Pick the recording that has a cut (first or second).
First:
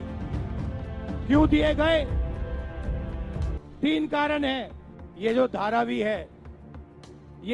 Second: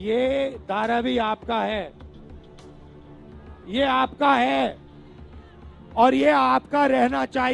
first